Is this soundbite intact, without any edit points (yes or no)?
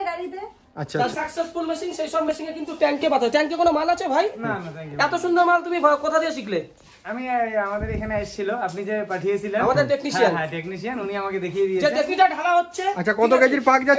no